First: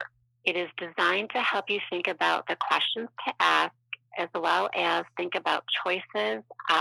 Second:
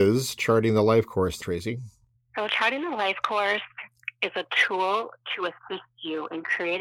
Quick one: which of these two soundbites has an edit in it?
second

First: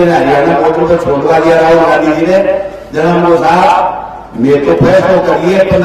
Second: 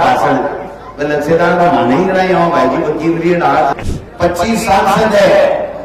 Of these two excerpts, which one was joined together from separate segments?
second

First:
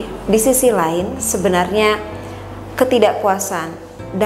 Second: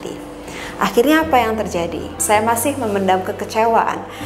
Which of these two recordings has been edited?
second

